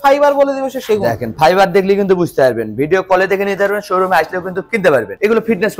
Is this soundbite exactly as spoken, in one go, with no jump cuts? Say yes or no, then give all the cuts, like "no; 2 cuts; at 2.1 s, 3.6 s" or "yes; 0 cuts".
yes; 0 cuts